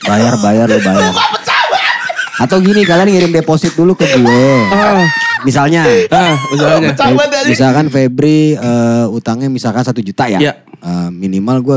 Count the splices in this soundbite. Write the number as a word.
zero